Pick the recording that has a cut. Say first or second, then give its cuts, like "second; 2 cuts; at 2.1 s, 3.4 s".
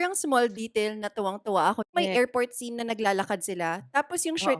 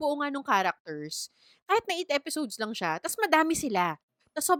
first; 1 cut; at 1.9 s